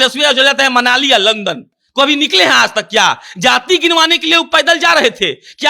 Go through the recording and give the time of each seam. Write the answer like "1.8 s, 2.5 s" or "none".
none